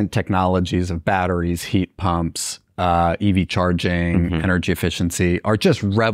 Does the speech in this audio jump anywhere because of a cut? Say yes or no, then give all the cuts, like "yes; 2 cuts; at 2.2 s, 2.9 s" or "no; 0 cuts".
no; 0 cuts